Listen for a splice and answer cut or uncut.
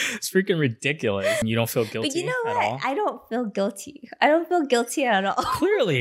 cut